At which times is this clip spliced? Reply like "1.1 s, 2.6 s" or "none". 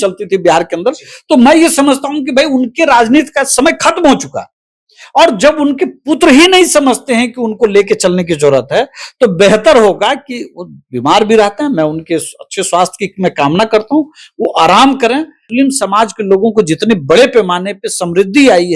15.4 s